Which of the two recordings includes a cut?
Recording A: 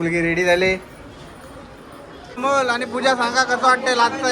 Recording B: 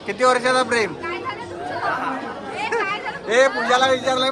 A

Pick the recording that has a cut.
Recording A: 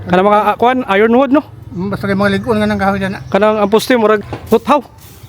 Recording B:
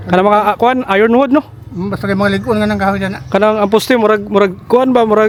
A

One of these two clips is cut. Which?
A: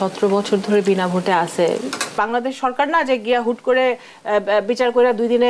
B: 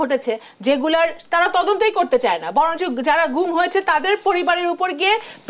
A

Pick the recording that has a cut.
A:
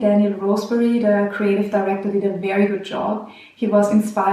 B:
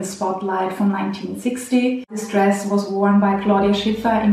B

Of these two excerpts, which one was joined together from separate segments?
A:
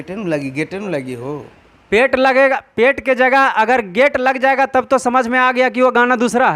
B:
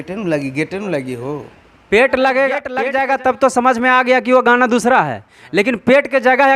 B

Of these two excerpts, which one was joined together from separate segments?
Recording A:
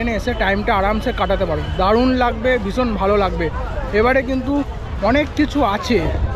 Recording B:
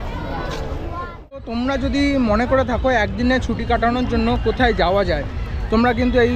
B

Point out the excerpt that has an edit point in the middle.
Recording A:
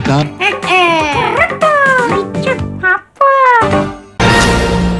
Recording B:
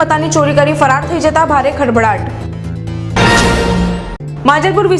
A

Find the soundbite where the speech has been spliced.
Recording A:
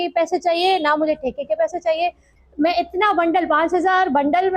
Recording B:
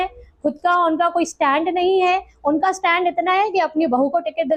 A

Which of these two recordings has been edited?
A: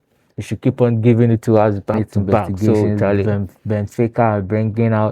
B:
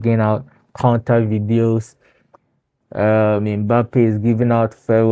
A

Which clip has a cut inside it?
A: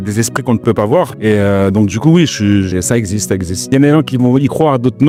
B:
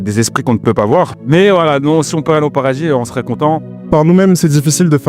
B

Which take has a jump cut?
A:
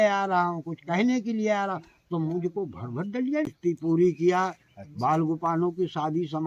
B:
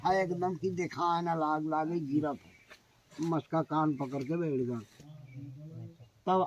A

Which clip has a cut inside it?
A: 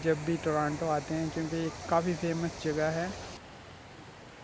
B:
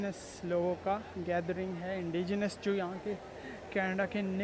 A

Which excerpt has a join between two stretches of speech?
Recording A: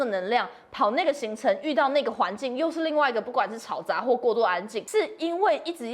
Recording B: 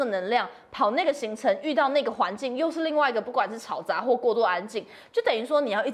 A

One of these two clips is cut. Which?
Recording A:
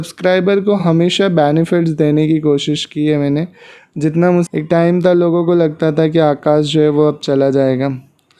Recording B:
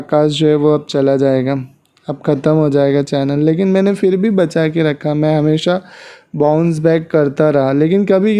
A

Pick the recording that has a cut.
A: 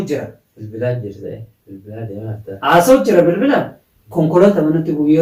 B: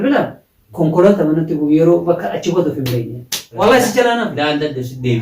B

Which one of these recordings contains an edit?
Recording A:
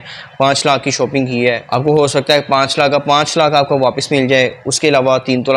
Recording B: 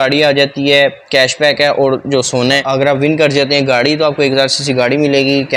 B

